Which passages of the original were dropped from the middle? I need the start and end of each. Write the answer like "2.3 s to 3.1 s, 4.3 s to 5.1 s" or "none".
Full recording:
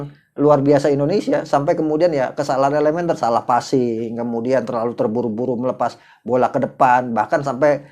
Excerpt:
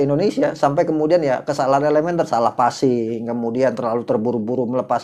none